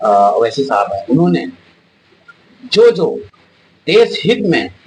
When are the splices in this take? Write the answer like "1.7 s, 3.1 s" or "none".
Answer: none